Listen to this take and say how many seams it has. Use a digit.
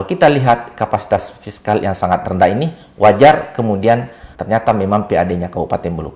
1